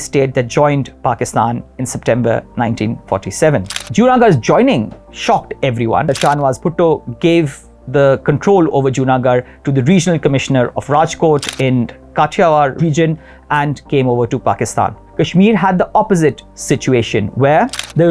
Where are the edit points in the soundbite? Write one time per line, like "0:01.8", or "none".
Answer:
0:06.1
0:12.7
0:15.0